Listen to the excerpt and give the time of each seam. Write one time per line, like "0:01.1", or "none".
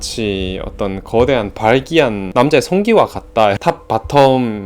0:03.6